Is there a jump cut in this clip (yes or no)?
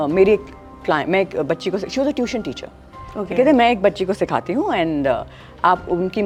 no